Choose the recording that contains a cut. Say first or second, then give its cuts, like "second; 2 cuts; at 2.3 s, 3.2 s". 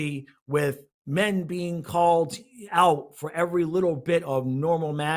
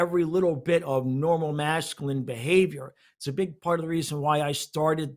first; 1 cut; at 0.9 s